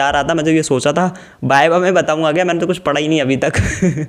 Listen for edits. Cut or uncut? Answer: uncut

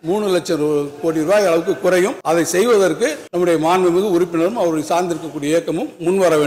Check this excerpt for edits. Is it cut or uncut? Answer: uncut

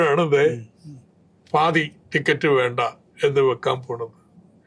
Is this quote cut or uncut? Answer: uncut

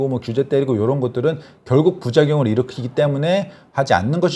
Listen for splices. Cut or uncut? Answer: uncut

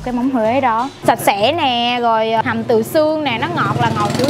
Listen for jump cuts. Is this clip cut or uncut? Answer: cut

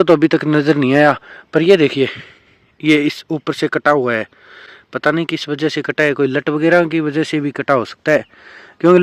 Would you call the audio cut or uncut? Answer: uncut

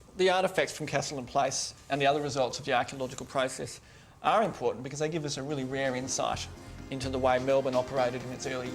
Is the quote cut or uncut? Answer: uncut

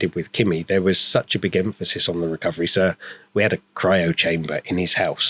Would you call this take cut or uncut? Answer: uncut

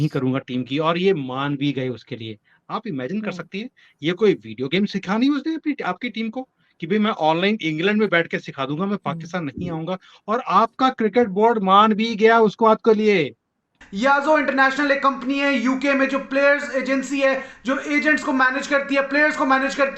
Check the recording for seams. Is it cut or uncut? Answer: cut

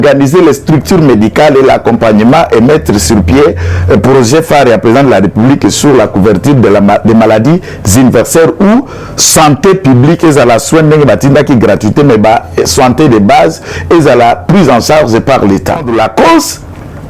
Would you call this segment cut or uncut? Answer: cut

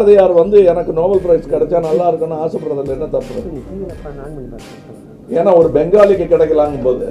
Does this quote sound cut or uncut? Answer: uncut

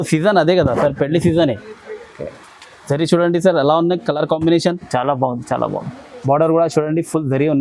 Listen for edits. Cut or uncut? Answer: uncut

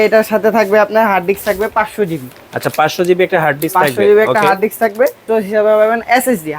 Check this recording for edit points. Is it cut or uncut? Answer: cut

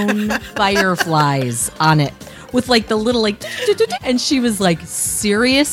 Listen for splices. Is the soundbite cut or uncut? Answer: cut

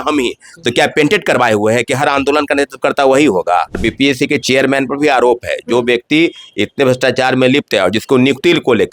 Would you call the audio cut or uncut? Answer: cut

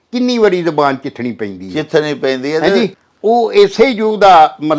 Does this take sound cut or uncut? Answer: cut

